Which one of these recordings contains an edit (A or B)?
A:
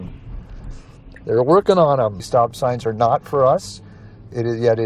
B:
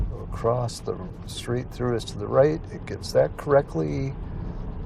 A